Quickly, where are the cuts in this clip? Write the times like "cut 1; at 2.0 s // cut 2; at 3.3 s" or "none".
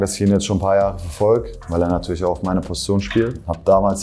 none